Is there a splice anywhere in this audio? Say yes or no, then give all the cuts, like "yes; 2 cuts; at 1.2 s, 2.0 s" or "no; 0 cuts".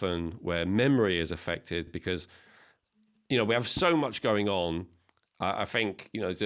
no; 0 cuts